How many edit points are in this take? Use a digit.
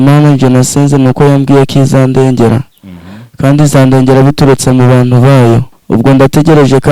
1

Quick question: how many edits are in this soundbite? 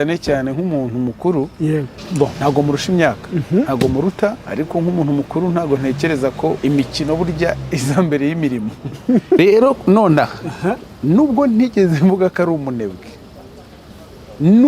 4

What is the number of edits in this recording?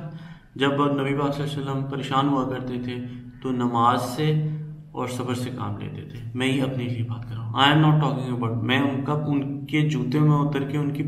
0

